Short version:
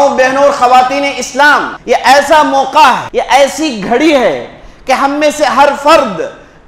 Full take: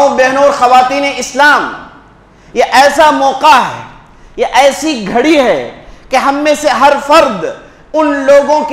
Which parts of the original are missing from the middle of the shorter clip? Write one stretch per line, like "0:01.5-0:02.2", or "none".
0:01.7-0:02.4
0:03.7-0:04.3